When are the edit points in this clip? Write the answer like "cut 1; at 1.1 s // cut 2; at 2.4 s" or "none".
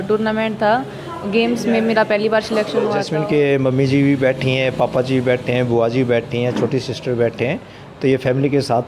cut 1; at 3.0 s